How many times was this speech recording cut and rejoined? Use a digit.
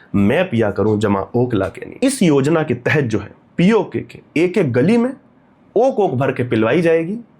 1